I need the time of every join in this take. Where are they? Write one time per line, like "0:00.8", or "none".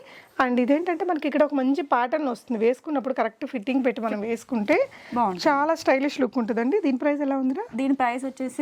none